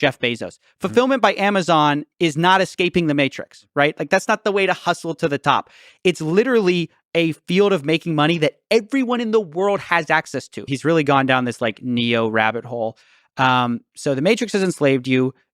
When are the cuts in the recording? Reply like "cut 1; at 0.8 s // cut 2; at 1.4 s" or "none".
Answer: cut 1; at 10.7 s